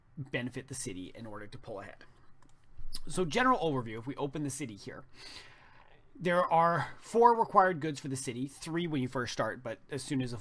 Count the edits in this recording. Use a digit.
1